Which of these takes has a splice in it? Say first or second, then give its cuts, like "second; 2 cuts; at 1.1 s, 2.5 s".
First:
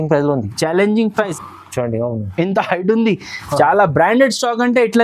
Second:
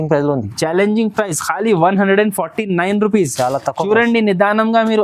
first; 1 cut; at 1.4 s